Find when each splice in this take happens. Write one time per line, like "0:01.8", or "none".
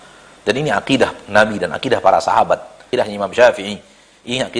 0:02.8